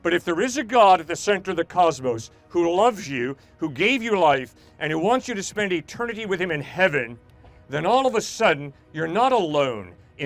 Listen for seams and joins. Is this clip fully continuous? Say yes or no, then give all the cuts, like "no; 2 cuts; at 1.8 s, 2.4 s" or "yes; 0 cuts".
yes; 0 cuts